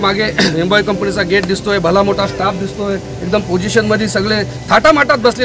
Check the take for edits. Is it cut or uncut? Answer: uncut